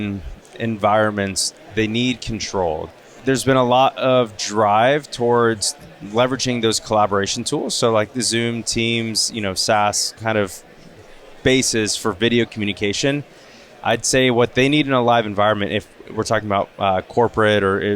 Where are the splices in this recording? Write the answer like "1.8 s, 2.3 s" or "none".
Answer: 2.8 s, 13.5 s